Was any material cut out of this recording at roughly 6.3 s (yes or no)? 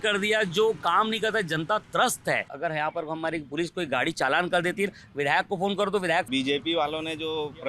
yes